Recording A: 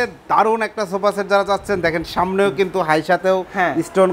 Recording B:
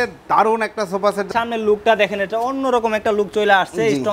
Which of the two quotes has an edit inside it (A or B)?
B